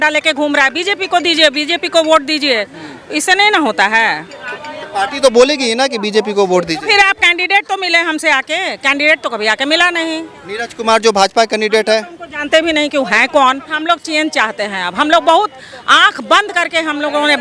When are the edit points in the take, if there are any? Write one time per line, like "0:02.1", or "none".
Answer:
0:13.8